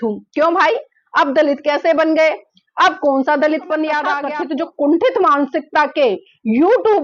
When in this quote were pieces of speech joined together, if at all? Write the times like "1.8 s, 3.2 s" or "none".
4.2 s